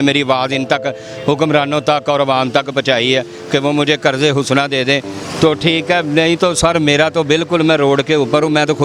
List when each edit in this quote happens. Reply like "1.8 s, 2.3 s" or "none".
none

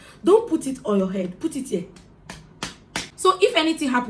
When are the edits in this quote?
3.1 s

